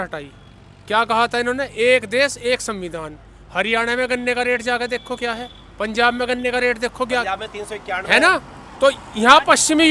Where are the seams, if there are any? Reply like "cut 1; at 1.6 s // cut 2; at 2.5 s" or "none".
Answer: none